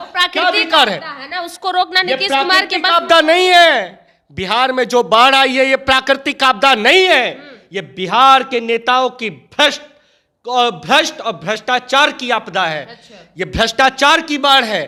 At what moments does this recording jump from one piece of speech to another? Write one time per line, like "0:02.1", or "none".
none